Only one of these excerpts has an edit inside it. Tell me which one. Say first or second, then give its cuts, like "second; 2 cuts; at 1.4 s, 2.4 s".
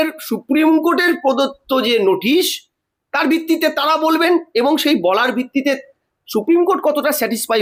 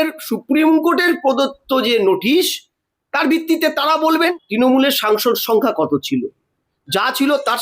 second; 1 cut; at 4.3 s